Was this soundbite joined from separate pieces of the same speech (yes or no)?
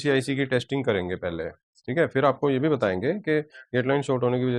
no